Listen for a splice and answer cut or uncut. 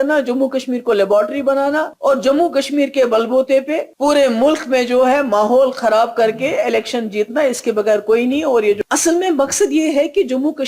cut